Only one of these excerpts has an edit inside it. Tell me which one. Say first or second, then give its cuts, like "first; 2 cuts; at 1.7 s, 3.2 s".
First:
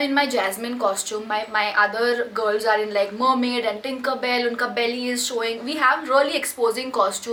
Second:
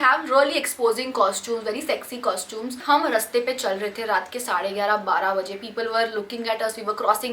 second; 1 cut; at 2.8 s